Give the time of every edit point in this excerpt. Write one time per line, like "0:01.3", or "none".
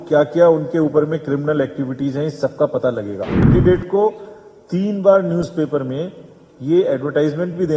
0:03.4